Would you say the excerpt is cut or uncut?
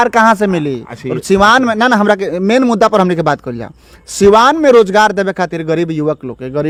uncut